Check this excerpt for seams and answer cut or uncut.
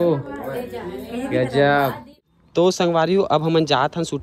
cut